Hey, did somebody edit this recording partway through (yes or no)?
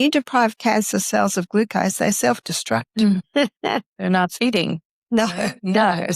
yes